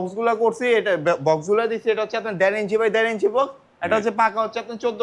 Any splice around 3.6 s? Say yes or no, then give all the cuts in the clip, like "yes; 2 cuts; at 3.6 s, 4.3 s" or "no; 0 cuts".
no; 0 cuts